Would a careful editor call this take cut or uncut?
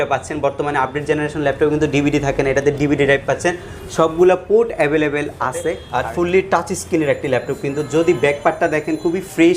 cut